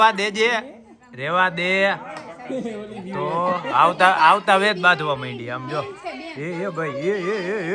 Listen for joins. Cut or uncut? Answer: uncut